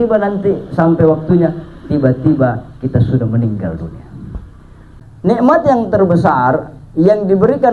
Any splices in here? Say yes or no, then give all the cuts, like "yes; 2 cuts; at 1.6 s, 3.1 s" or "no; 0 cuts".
yes; 1 cut; at 4.8 s